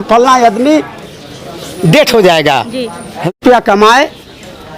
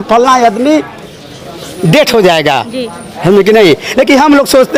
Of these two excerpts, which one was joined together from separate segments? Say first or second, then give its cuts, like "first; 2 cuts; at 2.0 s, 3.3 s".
first; 1 cut; at 3.3 s